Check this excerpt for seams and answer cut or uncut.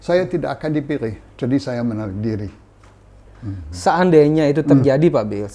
uncut